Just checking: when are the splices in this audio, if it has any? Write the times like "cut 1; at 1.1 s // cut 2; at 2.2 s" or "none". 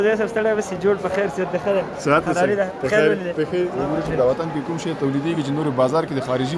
cut 1; at 3.8 s